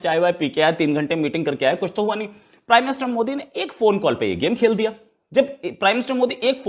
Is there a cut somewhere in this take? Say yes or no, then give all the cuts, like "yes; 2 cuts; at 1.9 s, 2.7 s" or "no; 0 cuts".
no; 0 cuts